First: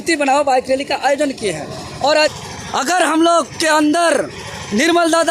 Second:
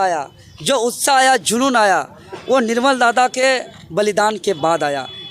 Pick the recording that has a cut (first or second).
first